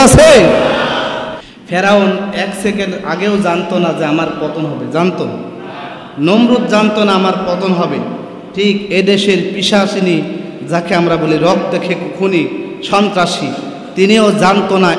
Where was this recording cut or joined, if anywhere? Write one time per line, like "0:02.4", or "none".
0:01.3